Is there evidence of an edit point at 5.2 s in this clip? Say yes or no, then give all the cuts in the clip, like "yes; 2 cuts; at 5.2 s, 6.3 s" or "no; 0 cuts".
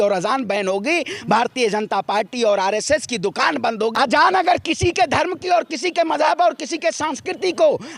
no; 1 cut; at 3.9 s